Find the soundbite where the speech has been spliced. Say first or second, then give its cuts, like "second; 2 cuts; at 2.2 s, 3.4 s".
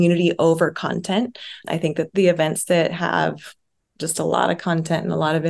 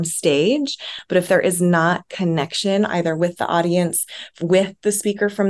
first; 1 cut; at 2.1 s